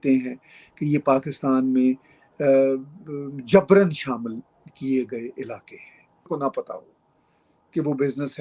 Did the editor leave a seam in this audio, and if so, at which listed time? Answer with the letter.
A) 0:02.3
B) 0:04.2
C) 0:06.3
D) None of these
C